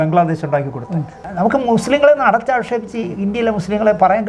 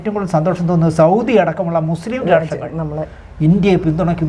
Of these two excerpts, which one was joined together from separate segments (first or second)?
first